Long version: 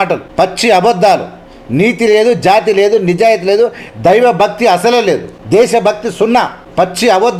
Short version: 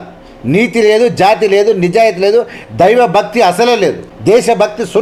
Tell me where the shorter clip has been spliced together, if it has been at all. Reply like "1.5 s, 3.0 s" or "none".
none